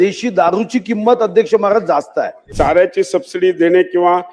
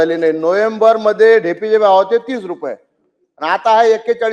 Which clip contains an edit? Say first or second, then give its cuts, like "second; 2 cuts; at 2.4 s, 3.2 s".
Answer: first; 1 cut; at 2.5 s